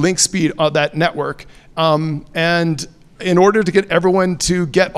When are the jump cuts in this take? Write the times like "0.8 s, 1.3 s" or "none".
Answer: none